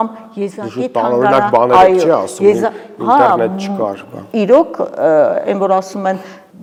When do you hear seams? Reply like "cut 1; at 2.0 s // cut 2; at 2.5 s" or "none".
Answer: none